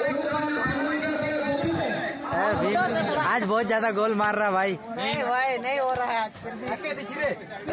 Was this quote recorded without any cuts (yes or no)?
yes